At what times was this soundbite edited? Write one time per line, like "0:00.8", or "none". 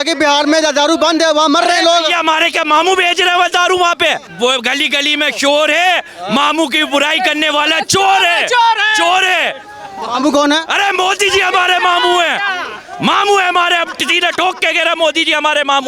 0:04.3